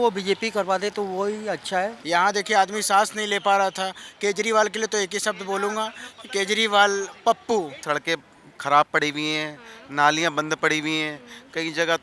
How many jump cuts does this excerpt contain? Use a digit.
2